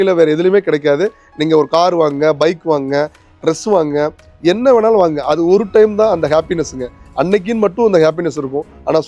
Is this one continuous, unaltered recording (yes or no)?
yes